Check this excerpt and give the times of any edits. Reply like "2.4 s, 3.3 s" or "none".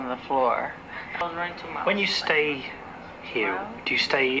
1.2 s